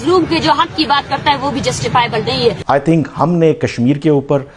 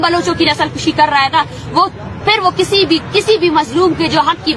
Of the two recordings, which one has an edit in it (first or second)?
first